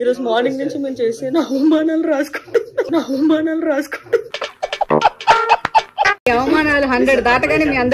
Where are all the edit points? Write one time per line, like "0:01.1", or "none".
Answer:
0:02.9
0:04.3
0:06.2